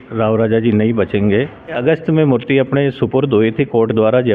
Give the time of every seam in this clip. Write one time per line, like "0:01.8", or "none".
0:01.8